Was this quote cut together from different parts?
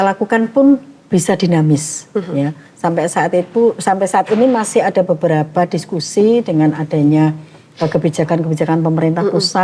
no; 0 cuts

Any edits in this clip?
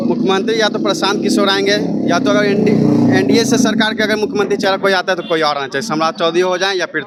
no; 0 cuts

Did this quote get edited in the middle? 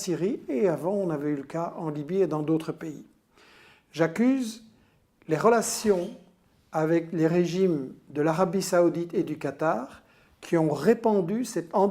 no; 0 cuts

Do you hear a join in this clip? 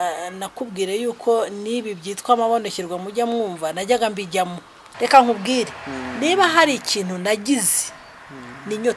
yes; 1 cut; at 4.9 s

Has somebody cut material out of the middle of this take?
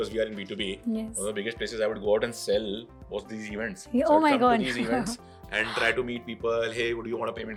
no; 0 cuts

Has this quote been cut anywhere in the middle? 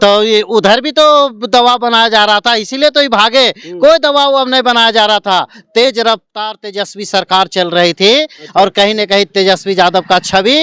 no; 0 cuts

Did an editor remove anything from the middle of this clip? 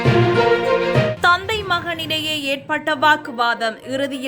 yes; 1 cut; at 1.1 s

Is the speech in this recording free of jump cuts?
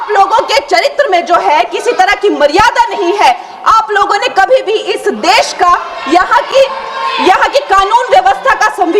yes; 0 cuts

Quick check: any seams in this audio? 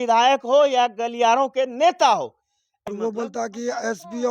yes; 1 cut; at 2.7 s

